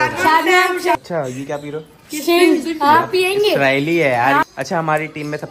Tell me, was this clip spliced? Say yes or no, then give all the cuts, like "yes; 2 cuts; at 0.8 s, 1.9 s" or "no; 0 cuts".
yes; 2 cuts; at 1.0 s, 4.4 s